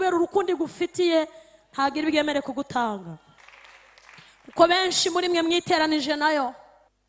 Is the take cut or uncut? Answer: uncut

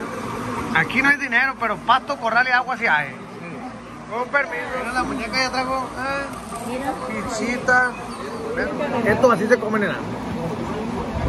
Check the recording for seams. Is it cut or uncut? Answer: uncut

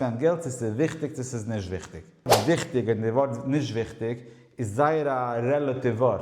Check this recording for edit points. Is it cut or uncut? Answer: cut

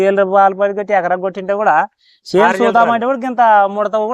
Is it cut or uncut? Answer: uncut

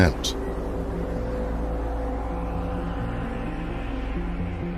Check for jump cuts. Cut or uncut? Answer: cut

